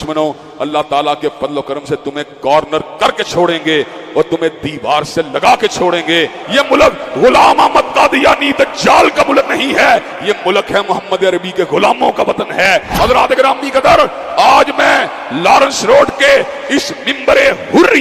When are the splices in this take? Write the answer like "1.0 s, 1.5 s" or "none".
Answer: 6.4 s, 12.7 s